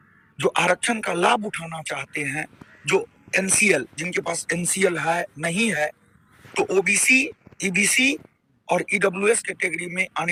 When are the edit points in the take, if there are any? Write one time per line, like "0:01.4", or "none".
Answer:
none